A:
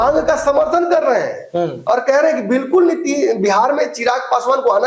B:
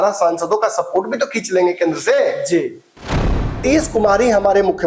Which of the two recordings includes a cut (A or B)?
B